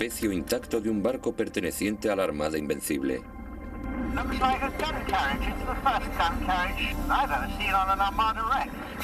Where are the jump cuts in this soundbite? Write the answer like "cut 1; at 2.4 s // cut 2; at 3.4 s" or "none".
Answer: cut 1; at 6.1 s